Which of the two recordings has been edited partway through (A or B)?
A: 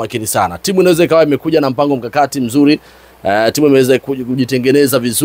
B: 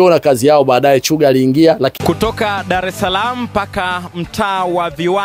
B